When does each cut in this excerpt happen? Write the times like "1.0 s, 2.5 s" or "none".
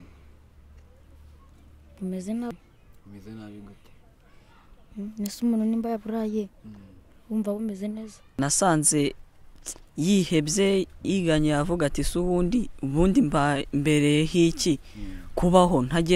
2.5 s, 8.4 s